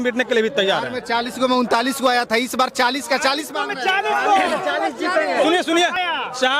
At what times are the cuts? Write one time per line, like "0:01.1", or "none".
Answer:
none